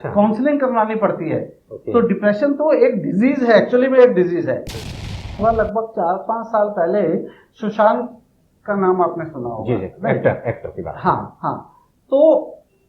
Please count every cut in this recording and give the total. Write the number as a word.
one